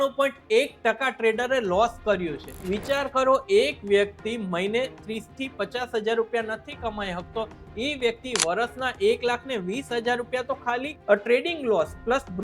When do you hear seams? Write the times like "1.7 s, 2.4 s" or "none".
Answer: 2.5 s, 10.9 s